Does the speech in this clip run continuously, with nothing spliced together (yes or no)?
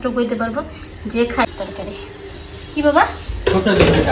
no